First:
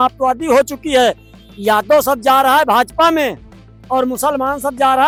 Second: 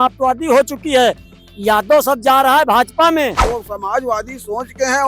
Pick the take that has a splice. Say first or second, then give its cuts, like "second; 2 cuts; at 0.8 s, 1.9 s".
second; 1 cut; at 3.4 s